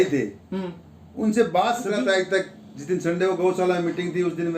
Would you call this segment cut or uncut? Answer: cut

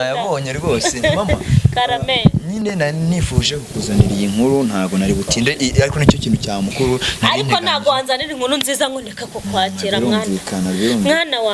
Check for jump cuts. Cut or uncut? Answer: uncut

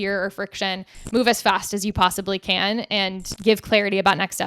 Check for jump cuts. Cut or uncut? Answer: cut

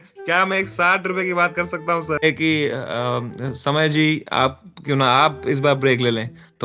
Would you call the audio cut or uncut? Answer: cut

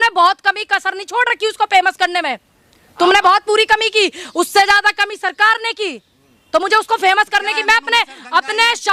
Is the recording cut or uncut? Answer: uncut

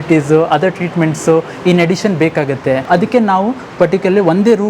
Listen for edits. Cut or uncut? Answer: cut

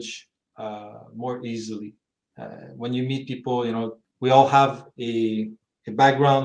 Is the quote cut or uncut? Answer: cut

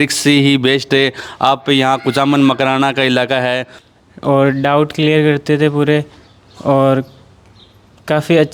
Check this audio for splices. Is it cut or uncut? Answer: cut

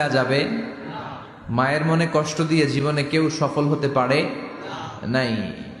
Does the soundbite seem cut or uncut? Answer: uncut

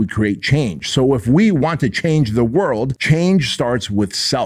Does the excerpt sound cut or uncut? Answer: cut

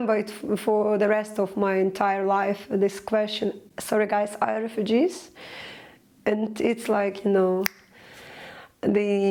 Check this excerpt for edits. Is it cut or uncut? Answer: uncut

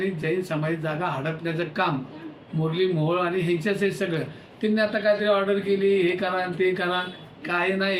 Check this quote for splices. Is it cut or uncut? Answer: uncut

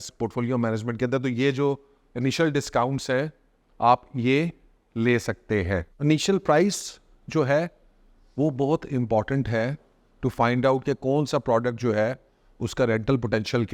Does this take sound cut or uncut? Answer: cut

